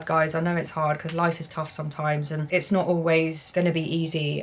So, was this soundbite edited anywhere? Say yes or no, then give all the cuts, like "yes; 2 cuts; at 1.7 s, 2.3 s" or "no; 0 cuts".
yes; 2 cuts; at 2.4 s, 3.4 s